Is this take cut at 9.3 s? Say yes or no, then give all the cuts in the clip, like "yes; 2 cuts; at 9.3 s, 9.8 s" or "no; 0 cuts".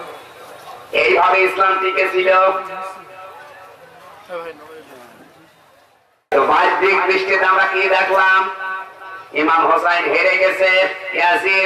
no; 1 cut; at 6.3 s